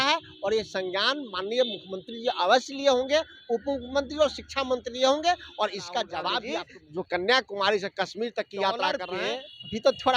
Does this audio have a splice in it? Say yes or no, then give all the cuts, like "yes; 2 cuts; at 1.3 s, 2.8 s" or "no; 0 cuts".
yes; 2 cuts; at 6.5 s, 9.1 s